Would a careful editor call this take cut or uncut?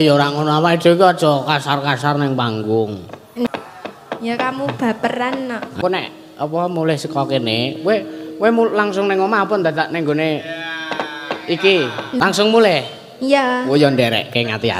cut